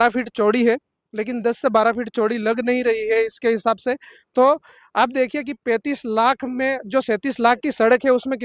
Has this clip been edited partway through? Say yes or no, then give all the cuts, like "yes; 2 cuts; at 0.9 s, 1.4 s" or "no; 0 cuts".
no; 0 cuts